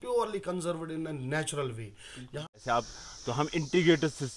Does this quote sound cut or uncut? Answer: cut